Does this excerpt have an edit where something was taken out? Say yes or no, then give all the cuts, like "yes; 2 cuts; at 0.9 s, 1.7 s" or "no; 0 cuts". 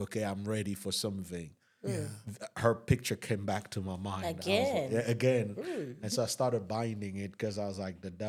no; 0 cuts